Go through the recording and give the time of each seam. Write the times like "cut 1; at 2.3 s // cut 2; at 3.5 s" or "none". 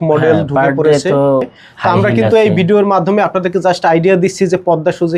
cut 1; at 1.6 s

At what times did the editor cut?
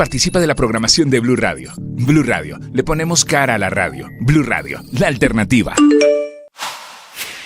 cut 1; at 6.5 s

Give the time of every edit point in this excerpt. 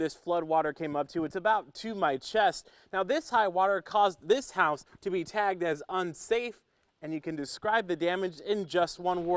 none

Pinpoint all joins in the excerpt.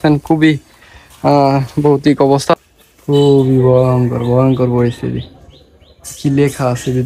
cut 1; at 2.5 s

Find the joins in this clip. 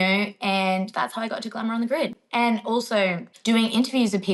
cut 1; at 3.3 s

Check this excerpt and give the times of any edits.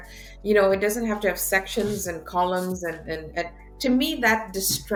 none

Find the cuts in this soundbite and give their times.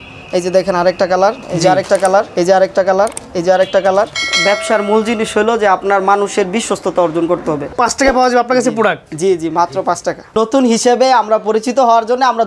cut 1; at 1.4 s // cut 2; at 2.3 s // cut 3; at 4.2 s // cut 4; at 7.7 s // cut 5; at 10.3 s

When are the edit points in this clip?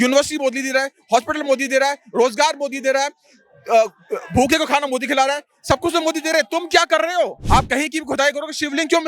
cut 1; at 7.4 s

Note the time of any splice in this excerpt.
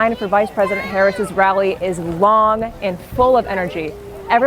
none

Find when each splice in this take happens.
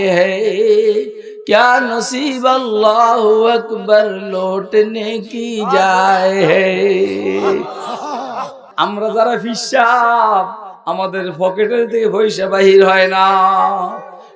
cut 1; at 8.6 s

